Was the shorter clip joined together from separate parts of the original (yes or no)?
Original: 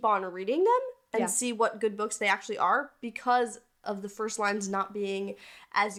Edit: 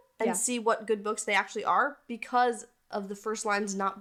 no